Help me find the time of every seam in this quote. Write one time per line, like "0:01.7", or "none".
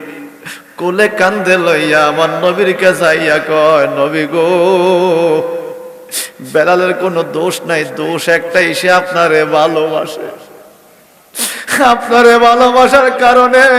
none